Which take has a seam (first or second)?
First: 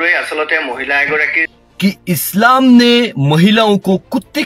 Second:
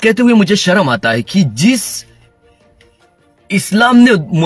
first